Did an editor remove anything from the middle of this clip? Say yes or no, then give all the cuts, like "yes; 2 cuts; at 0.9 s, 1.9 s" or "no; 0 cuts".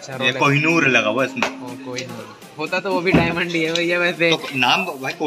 no; 0 cuts